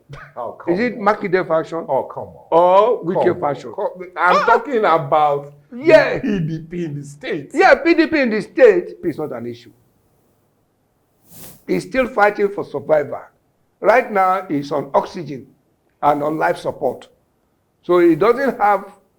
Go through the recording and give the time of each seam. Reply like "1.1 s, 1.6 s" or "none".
9.0 s